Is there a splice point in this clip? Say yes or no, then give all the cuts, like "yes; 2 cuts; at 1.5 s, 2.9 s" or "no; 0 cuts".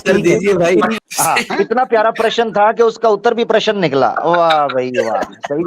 yes; 1 cut; at 1.0 s